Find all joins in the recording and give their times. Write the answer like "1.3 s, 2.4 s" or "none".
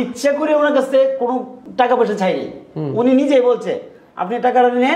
1.6 s